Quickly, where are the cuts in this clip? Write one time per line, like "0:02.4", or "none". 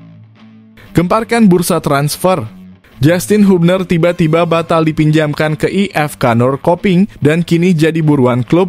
0:00.9